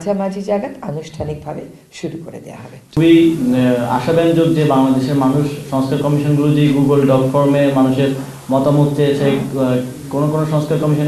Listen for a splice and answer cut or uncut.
cut